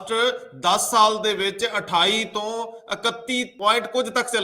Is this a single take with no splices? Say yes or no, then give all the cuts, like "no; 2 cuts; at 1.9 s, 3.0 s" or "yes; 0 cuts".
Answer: no; 1 cut; at 3.5 s